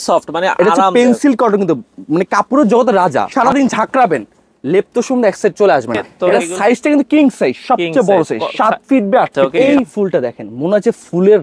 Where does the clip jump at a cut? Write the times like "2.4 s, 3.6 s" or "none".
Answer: 3.3 s, 6.1 s, 9.5 s